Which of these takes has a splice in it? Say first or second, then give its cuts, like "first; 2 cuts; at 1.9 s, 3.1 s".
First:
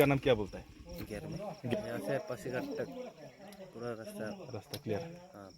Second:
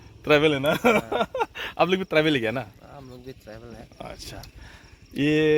first; 1 cut; at 1.7 s